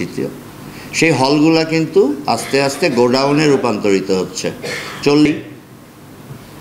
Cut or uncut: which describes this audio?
cut